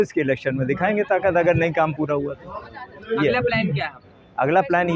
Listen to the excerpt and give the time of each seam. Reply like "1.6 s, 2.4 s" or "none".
none